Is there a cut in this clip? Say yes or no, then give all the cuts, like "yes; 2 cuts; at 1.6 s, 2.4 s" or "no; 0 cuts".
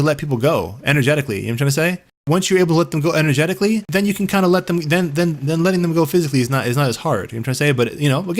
yes; 2 cuts; at 2.2 s, 3.9 s